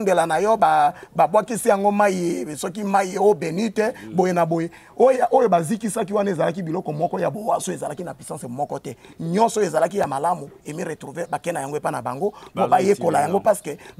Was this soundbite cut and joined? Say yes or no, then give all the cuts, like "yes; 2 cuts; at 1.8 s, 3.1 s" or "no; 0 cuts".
no; 0 cuts